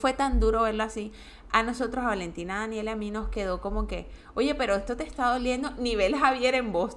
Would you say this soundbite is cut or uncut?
uncut